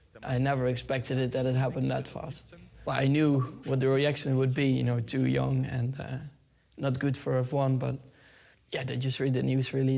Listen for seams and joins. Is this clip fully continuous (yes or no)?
no